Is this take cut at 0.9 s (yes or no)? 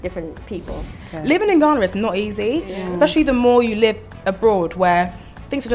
yes